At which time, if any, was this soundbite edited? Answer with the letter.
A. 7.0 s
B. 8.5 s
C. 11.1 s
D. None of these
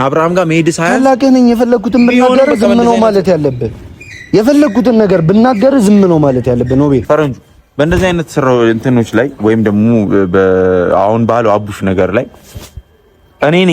A